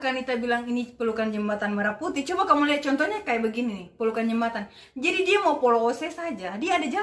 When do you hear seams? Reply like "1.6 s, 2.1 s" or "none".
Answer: none